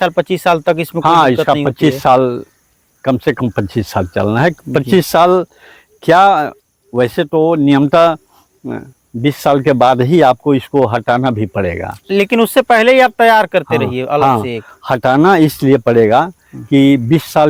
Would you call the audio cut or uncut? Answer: uncut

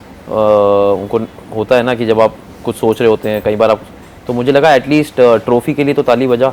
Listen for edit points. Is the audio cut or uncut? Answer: uncut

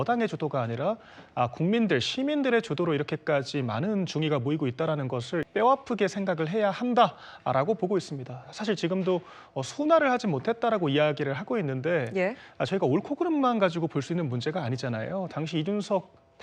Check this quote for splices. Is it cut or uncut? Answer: cut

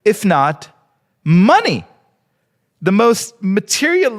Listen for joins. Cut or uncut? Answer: uncut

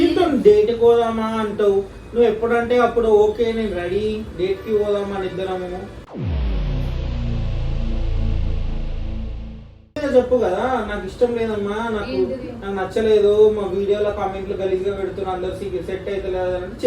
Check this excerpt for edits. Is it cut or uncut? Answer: cut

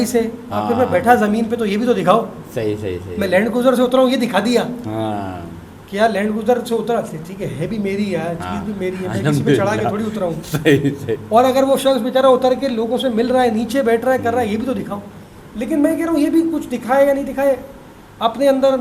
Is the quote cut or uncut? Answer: uncut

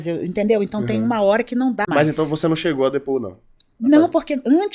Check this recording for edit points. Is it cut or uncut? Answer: cut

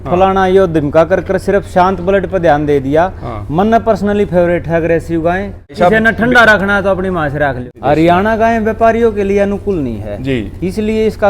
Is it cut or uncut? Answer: cut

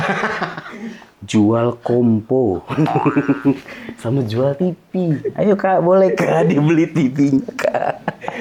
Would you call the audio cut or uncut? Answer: uncut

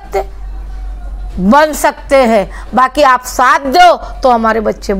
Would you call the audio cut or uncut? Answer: uncut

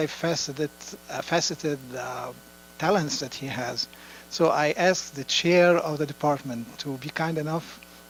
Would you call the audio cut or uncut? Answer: uncut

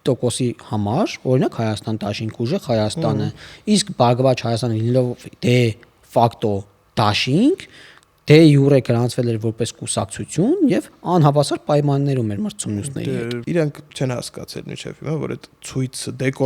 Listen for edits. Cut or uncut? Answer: cut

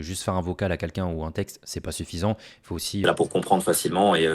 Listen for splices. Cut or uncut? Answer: cut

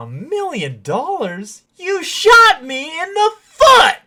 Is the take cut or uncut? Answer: uncut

